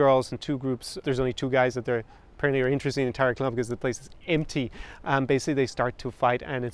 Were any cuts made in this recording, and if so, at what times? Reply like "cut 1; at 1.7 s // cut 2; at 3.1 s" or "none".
cut 1; at 1.0 s